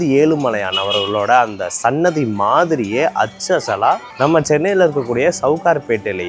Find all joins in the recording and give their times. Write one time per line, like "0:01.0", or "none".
0:04.1